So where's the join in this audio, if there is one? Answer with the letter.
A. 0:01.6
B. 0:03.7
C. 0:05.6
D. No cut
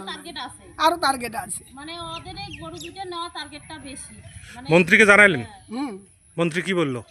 D